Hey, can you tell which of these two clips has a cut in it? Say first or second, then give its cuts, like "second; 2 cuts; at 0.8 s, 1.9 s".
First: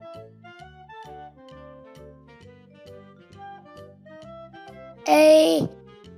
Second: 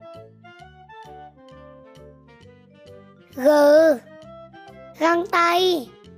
second; 1 cut; at 3.3 s